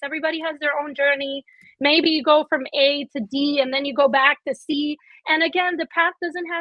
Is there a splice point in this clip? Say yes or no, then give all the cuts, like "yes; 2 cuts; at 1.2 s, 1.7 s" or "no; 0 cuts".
no; 0 cuts